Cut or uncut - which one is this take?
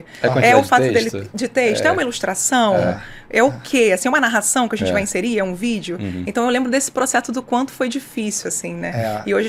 uncut